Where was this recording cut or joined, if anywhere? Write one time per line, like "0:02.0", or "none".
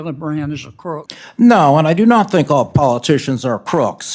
0:01.2